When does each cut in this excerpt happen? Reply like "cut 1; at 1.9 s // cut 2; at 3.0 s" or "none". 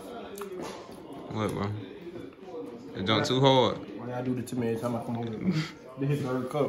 none